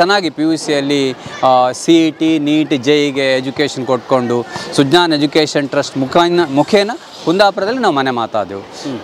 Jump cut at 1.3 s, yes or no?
no